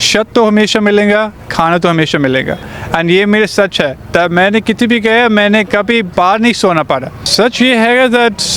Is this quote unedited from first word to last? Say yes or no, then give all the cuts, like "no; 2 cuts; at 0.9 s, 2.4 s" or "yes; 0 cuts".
no; 1 cut; at 7.2 s